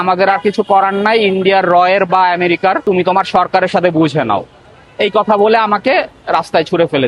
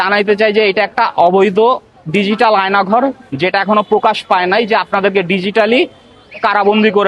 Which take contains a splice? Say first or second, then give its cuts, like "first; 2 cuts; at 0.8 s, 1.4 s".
first; 1 cut; at 2.8 s